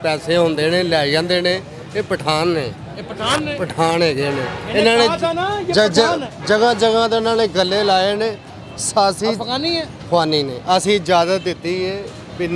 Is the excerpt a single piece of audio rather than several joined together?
yes; 0 cuts

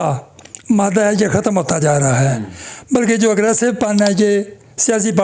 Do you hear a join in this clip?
no; 0 cuts

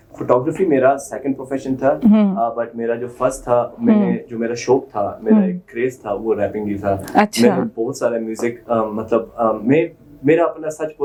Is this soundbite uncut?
yes; 0 cuts

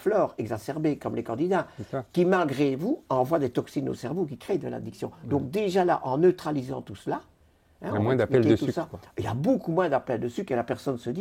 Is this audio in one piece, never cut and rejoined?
yes; 0 cuts

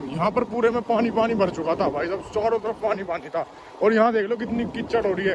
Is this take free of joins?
yes; 0 cuts

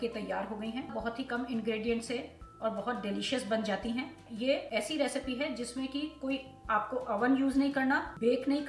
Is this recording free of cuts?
no; 2 cuts; at 0.9 s, 4.2 s

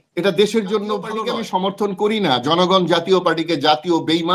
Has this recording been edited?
yes; 1 cut; at 1.2 s

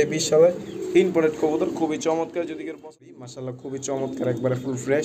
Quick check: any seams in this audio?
yes; 1 cut; at 3.1 s

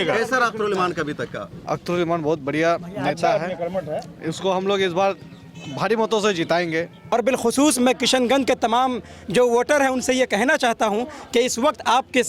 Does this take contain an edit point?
yes; 1 cut; at 7.1 s

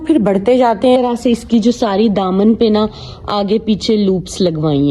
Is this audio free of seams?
no; 1 cut; at 1.0 s

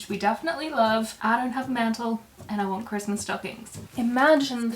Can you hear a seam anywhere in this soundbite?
yes; 2 cuts; at 1.1 s, 3.8 s

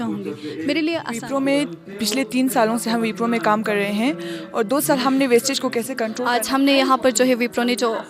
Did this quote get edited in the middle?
yes; 2 cuts; at 1.2 s, 6.2 s

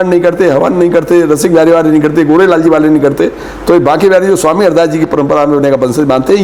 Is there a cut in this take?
no; 0 cuts

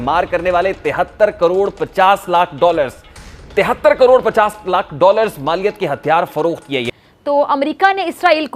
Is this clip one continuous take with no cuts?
no; 1 cut; at 6.9 s

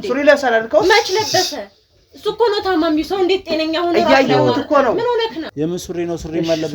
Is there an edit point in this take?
yes; 1 cut; at 5.5 s

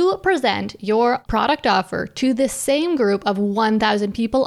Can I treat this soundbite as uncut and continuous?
no; 1 cut; at 1.2 s

